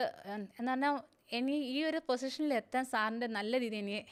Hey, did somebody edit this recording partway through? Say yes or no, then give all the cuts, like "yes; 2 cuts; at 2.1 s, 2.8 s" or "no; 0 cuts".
no; 0 cuts